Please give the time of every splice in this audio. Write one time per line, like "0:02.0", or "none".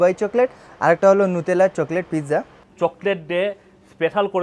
0:02.6